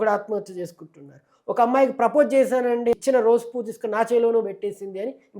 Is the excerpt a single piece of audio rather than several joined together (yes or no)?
no